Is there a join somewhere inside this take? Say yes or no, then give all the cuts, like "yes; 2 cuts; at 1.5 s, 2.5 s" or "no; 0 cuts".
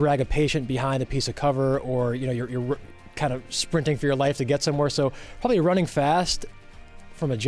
no; 0 cuts